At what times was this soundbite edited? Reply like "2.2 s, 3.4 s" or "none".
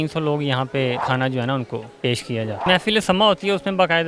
1.0 s, 2.7 s